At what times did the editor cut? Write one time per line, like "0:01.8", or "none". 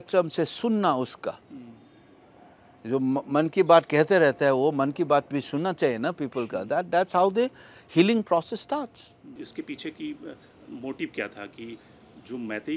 0:09.3

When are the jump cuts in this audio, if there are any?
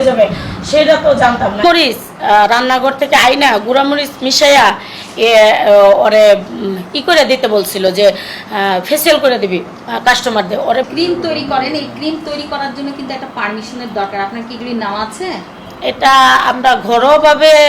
0:01.6
0:10.9

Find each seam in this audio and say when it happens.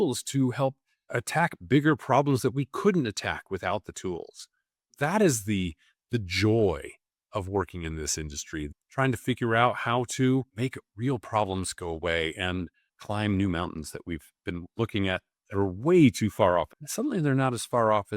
0:01.2
0:08.7
0:16.8

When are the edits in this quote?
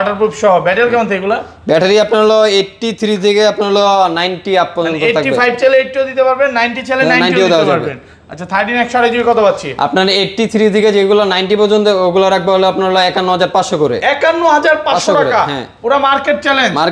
none

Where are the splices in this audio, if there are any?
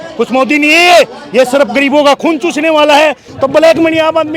0:03.3

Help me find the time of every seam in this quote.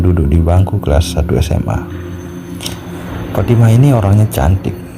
0:01.8
0:03.3

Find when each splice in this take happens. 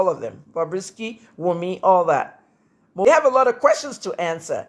0:03.1

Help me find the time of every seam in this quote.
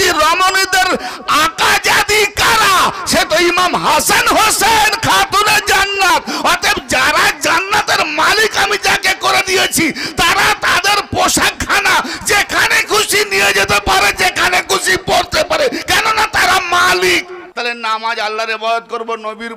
0:17.4

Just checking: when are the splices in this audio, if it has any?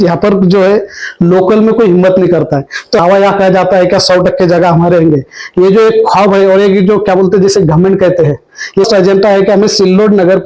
0:03.0
0:08.9

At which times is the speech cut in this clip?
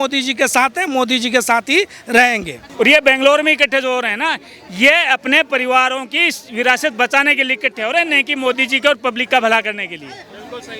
0:02.6

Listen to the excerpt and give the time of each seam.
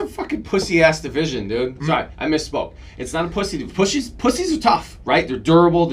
0:01.8

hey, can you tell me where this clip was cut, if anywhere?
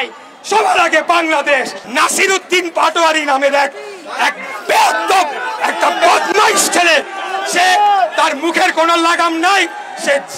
0:01.8

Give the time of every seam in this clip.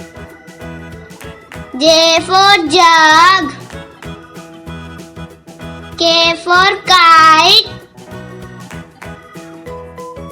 0:01.7
0:03.6
0:06.0
0:08.0

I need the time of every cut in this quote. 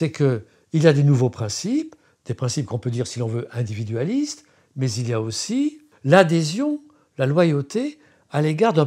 0:05.9

